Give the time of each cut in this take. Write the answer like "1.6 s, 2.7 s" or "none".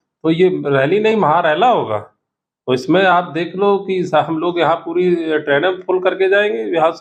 none